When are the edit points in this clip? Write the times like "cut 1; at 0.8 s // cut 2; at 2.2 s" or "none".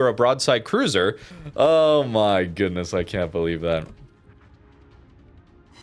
cut 1; at 1.3 s